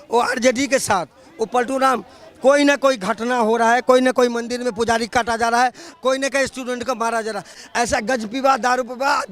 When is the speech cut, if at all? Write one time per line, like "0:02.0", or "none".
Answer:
0:07.6

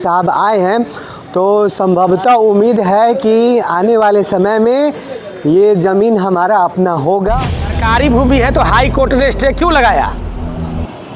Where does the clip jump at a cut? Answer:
0:07.5

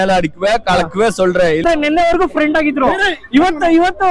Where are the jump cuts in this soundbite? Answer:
0:01.6

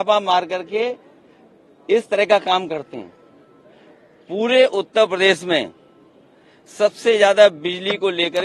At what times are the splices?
none

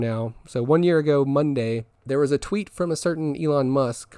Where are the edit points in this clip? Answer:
0:01.9

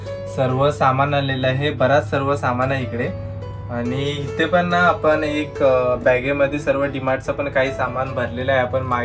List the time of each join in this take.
none

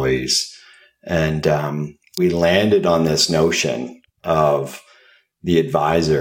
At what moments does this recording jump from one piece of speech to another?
0:02.1

